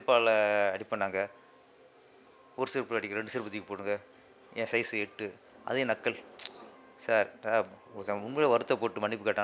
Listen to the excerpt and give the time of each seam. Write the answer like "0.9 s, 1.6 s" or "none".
none

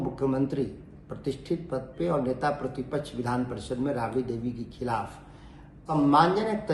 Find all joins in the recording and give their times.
5.8 s

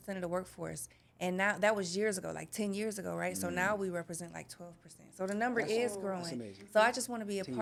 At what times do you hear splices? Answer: none

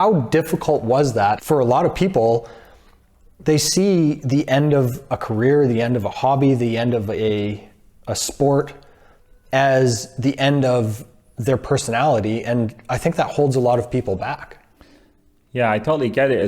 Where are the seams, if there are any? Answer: 1.4 s

